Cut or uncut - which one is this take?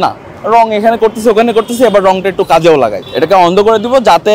cut